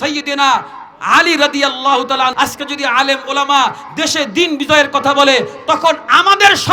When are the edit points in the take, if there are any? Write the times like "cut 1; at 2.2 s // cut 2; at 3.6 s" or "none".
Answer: cut 1; at 2.3 s